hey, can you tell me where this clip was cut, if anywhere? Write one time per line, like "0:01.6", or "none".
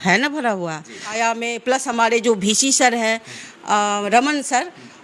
0:01.1